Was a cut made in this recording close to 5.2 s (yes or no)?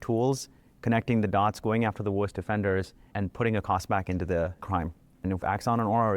yes